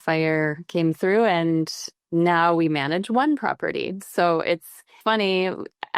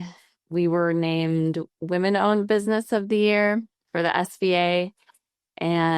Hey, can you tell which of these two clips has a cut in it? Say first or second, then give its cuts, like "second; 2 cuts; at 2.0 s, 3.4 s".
second; 1 cut; at 3.8 s